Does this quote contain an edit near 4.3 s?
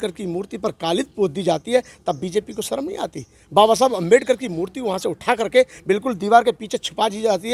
no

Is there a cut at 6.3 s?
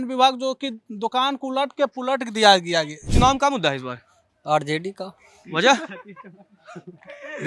no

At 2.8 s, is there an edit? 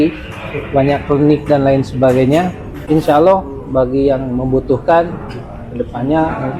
yes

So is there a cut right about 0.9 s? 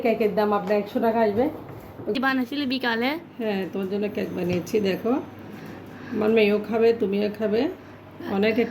no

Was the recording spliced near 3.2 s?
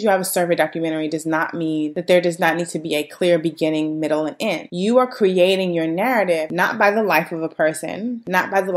no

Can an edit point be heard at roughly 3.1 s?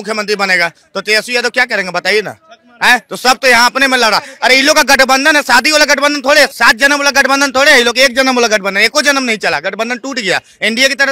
no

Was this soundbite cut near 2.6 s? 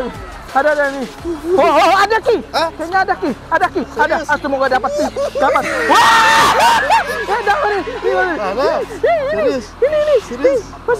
no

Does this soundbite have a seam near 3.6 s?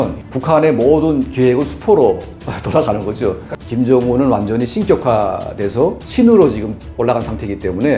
yes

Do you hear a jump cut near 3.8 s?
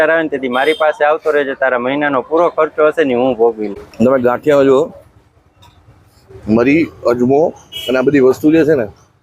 yes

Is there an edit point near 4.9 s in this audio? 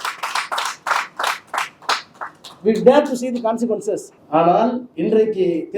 yes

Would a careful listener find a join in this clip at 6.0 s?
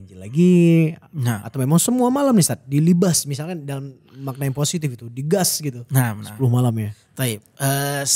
no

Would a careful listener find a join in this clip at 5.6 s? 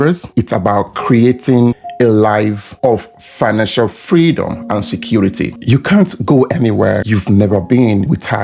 yes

